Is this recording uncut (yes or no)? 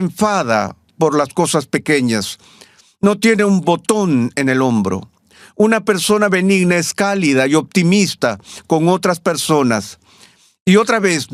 yes